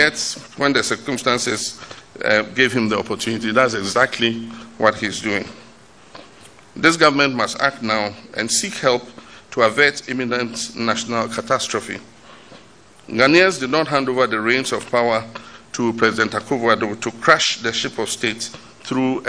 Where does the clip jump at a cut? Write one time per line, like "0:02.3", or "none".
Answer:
none